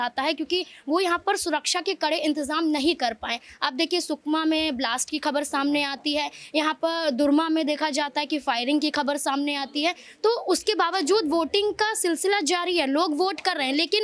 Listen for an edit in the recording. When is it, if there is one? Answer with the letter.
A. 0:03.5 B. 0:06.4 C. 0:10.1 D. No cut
D